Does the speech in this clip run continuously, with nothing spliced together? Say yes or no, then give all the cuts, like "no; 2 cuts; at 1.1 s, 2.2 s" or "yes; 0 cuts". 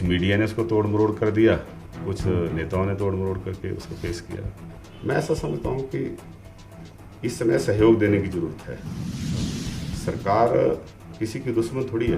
no; 1 cut; at 4.8 s